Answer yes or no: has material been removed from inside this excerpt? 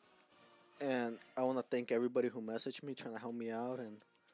yes